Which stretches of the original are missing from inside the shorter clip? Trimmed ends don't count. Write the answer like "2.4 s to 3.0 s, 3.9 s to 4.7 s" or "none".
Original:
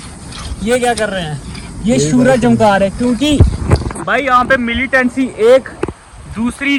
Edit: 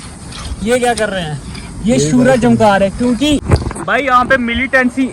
3.4 s to 3.6 s